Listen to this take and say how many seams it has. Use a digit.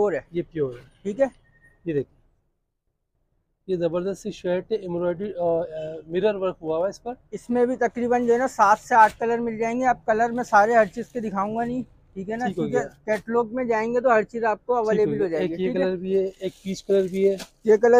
0